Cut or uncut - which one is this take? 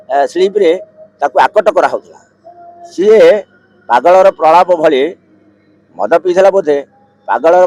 uncut